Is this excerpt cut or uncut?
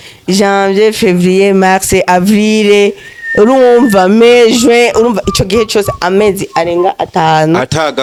uncut